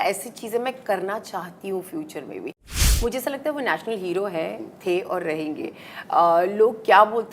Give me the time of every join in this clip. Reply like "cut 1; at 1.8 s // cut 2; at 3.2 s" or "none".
cut 1; at 2.7 s